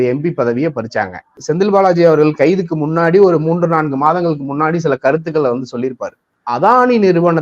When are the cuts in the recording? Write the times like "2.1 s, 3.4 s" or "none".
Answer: 1.4 s, 6.4 s